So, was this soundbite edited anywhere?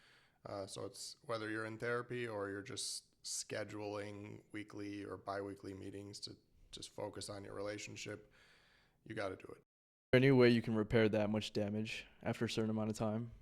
yes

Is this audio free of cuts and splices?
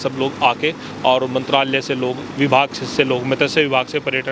yes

